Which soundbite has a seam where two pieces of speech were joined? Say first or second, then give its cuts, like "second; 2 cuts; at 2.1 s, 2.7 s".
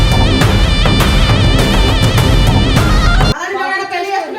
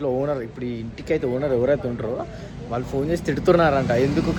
first; 1 cut; at 3.4 s